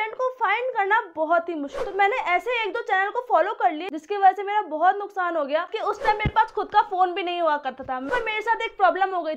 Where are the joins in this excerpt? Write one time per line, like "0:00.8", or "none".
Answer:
0:01.8
0:05.7
0:08.1